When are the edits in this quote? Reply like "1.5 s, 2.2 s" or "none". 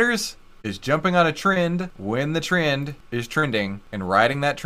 1.9 s, 3.5 s